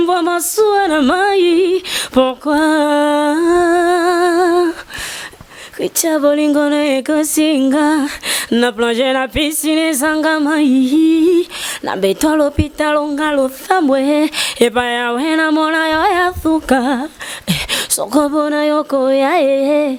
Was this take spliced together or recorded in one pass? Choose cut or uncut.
uncut